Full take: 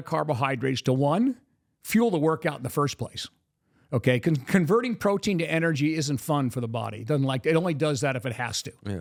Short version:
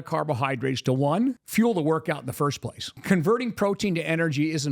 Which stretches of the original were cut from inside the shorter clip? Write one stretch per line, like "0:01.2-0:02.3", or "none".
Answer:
0:01.4-0:01.8
0:03.4-0:04.4